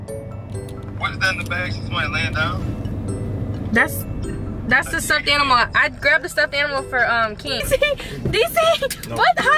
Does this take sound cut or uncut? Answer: cut